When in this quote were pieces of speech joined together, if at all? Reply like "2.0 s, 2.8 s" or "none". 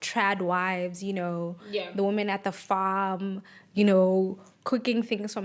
none

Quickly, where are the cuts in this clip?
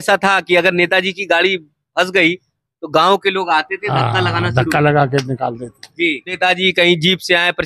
6.3 s

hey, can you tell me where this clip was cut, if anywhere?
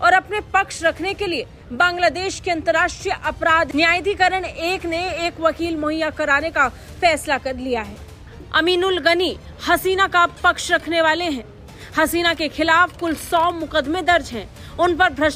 none

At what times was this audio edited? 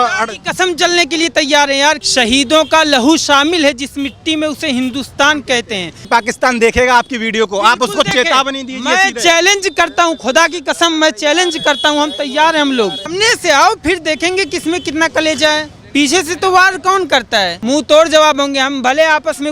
2.0 s, 6.1 s, 13.1 s, 15.7 s, 17.6 s

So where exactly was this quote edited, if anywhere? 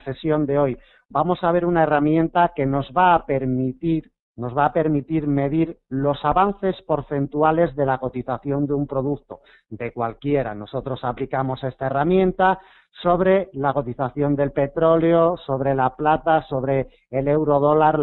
8.3 s

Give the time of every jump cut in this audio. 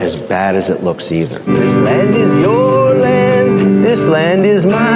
1.5 s

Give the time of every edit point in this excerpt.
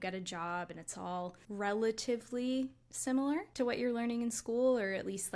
1.4 s, 3.5 s

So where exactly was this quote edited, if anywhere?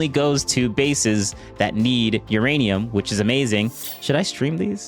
3.9 s

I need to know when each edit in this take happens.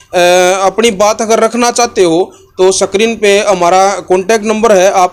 none

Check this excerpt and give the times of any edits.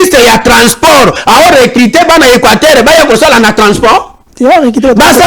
4.2 s

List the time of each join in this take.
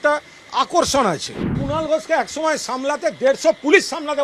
1.5 s

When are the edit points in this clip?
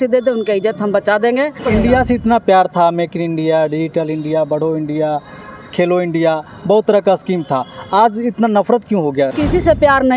1.6 s, 9.3 s

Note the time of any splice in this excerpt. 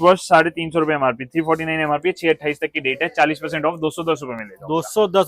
none

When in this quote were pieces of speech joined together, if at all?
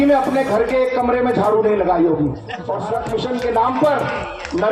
2.8 s

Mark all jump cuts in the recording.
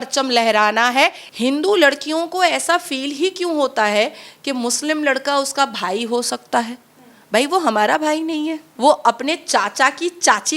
1.2 s, 8.7 s

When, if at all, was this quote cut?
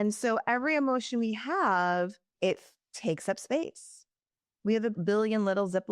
2.3 s

